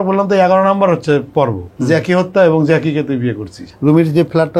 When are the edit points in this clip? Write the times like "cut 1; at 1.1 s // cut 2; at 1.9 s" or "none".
cut 1; at 1.6 s // cut 2; at 3.7 s